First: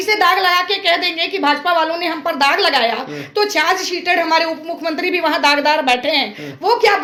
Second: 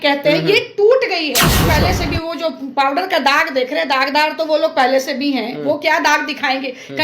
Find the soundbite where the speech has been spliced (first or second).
second